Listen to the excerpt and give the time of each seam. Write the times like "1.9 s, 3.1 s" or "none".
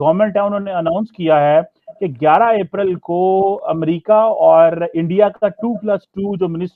none